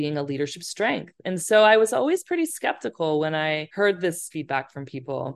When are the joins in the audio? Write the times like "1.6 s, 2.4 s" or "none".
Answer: 3.7 s, 4.3 s